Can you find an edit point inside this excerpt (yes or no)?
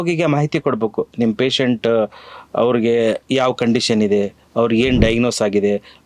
no